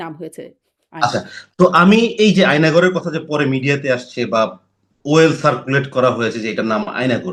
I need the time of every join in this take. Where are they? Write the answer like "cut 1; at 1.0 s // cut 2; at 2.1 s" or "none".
none